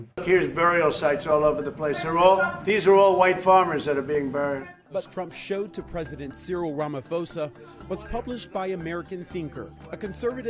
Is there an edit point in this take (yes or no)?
no